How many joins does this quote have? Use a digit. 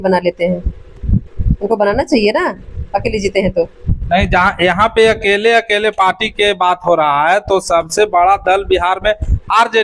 0